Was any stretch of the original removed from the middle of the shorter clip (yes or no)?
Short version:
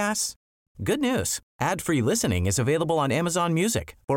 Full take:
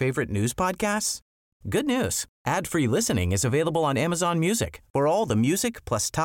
no